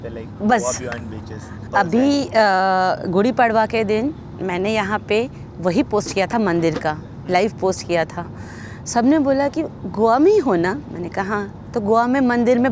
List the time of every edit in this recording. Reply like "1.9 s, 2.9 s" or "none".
1.7 s